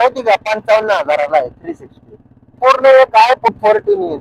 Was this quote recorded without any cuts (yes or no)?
no